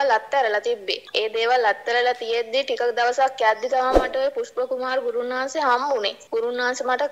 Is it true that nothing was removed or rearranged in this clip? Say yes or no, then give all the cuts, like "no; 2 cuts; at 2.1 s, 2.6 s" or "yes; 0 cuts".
no; 2 cuts; at 1.0 s, 6.2 s